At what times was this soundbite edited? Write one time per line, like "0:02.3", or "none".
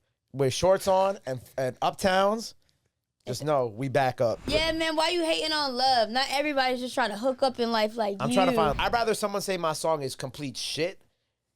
0:04.4
0:08.8

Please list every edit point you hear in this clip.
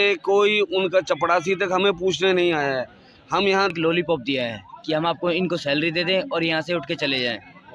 0:03.7

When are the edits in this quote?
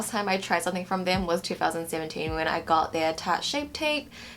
none

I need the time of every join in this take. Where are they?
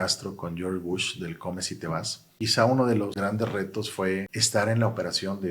0:02.3
0:03.1
0:04.4

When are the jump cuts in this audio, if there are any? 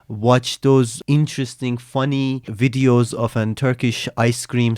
0:01.0
0:02.5

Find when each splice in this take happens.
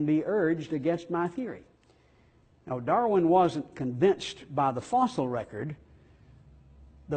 none

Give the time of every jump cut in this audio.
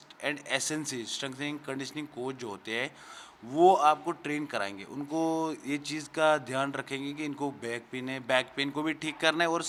none

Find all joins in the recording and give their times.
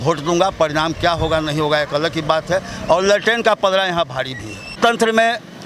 0:04.8

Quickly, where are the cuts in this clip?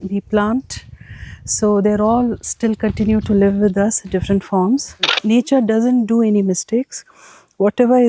0:05.2

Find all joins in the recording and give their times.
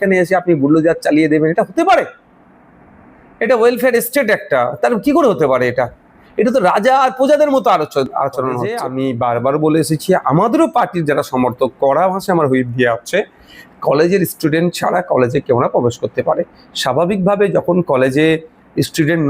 0:08.8

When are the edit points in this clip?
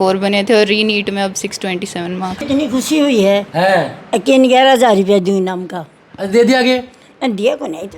0:02.4

